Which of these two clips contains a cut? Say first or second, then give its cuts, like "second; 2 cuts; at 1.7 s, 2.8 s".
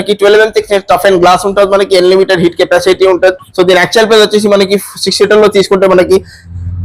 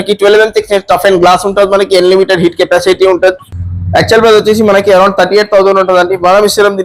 second; 1 cut; at 3.4 s